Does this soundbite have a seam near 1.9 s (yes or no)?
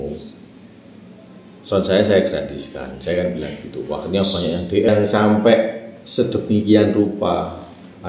no